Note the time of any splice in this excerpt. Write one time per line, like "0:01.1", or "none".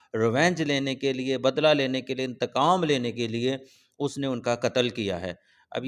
none